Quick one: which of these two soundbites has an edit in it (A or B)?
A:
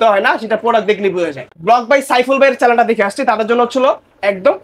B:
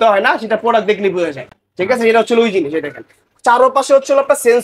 A